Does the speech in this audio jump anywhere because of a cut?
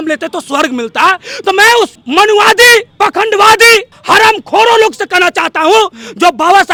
no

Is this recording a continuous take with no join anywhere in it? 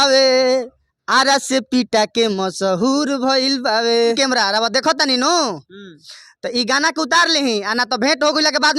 no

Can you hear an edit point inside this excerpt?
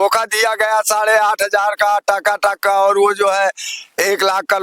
no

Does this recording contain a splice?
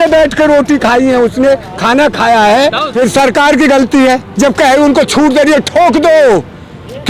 yes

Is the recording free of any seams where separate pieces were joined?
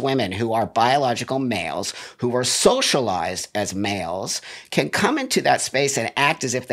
yes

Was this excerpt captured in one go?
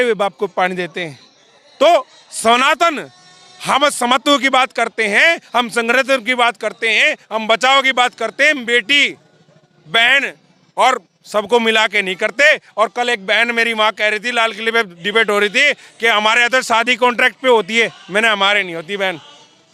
yes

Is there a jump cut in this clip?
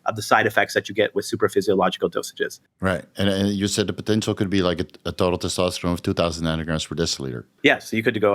yes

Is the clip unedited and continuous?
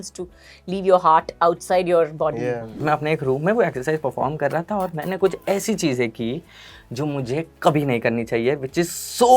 no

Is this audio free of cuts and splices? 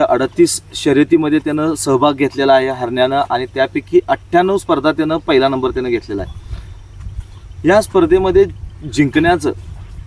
yes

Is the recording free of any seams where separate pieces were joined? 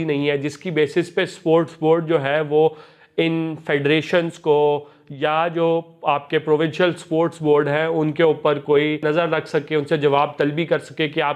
no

